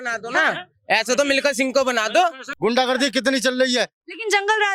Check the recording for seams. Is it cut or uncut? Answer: cut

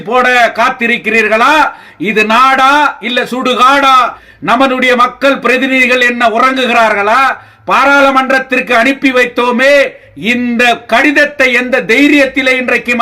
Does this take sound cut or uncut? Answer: cut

